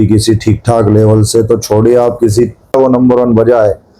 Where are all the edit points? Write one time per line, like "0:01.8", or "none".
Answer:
0:02.7